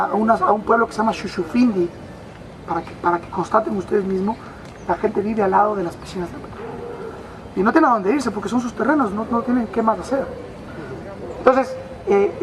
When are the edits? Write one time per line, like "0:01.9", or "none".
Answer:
none